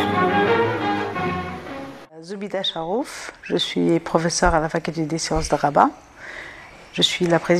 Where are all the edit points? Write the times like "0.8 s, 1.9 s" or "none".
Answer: none